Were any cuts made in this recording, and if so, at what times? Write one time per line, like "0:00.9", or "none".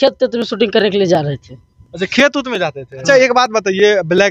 0:03.0

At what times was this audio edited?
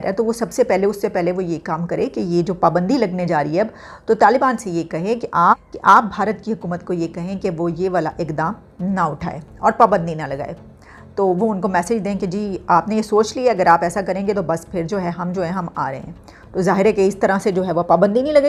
none

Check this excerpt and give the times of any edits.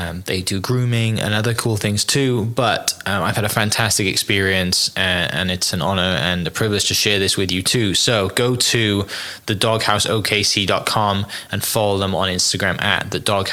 none

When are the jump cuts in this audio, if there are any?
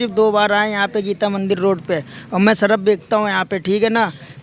none

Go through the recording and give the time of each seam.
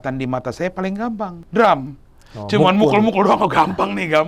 0:01.4

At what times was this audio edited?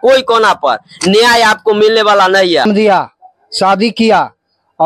0:02.7

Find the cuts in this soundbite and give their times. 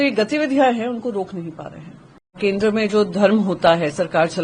0:02.4

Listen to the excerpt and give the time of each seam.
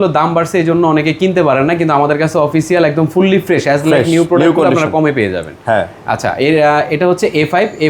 none

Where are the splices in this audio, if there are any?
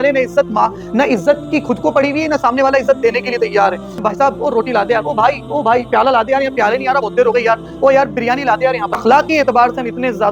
0:04.0
0:09.0

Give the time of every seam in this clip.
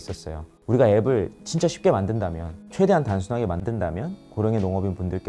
0:03.6

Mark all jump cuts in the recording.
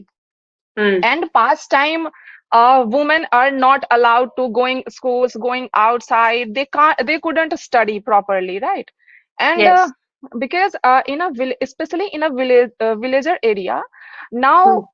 none

